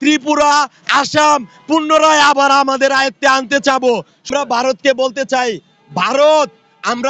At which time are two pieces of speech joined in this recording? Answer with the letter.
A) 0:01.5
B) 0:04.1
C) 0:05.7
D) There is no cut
B